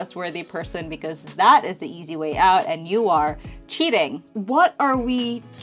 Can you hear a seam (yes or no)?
yes